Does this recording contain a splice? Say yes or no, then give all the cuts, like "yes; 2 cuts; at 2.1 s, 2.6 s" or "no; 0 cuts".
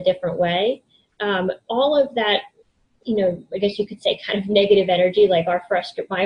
no; 0 cuts